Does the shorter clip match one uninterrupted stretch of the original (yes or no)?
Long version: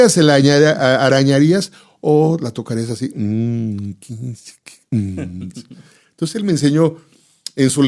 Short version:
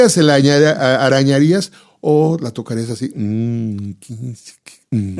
yes